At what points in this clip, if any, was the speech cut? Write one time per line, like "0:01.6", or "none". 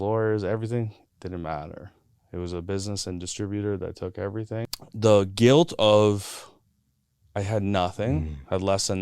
0:04.7